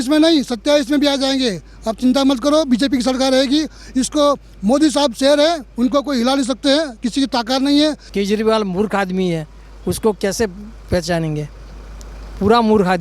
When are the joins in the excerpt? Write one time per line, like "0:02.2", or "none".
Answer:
0:08.0